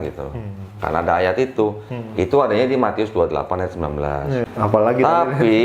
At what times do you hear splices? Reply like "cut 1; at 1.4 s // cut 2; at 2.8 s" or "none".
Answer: cut 1; at 4.5 s